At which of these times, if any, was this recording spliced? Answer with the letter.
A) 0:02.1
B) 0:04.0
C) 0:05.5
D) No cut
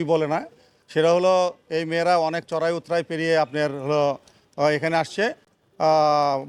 D